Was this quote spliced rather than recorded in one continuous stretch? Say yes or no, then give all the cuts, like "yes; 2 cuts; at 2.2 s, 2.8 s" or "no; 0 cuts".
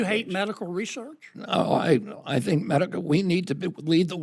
no; 0 cuts